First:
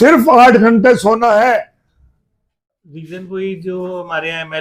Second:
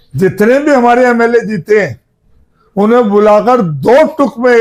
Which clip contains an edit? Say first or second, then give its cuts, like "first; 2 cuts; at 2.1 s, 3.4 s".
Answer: first; 1 cut; at 3.0 s